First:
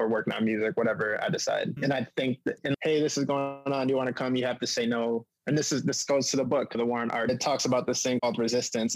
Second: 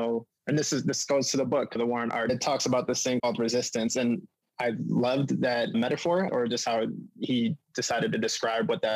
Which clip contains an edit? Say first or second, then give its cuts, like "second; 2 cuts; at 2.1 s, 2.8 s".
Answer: second; 1 cut; at 6.3 s